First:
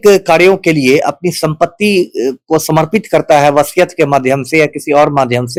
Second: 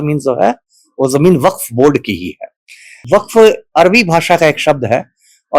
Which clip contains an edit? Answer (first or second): second